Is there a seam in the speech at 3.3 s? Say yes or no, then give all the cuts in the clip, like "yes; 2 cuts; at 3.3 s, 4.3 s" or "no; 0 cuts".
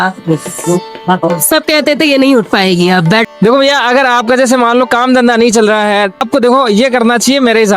yes; 2 cuts; at 3.3 s, 6.2 s